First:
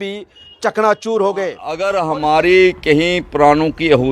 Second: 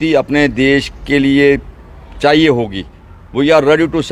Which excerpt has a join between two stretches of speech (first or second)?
first